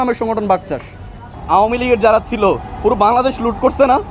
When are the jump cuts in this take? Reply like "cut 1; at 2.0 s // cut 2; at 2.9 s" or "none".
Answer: none